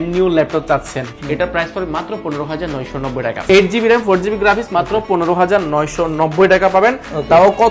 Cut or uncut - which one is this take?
cut